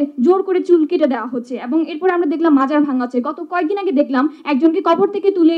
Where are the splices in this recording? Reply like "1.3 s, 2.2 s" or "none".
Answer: none